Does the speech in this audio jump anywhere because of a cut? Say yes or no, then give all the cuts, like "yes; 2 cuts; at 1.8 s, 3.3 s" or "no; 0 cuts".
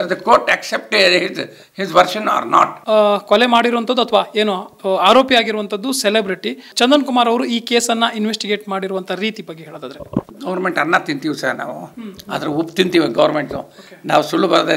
yes; 3 cuts; at 2.8 s, 6.7 s, 10.3 s